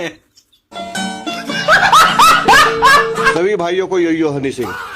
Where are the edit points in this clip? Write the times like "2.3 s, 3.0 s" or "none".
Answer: 3.4 s